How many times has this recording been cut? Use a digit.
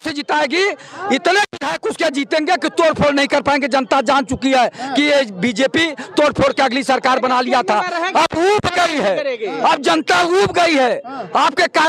0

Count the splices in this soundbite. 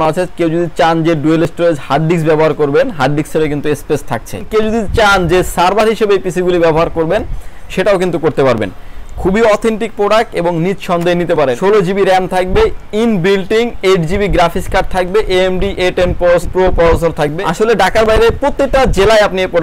4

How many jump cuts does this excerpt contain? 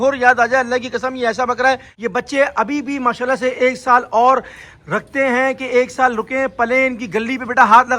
1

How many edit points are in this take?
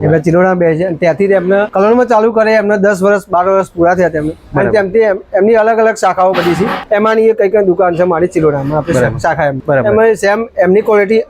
3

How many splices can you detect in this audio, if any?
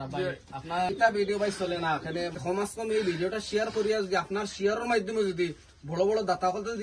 2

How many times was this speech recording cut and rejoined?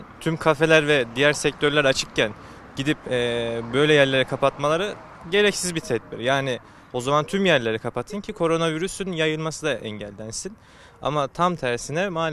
0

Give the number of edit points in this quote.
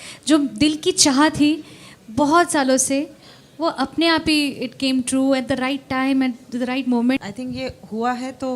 1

